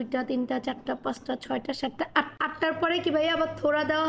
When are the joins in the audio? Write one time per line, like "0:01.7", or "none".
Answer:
none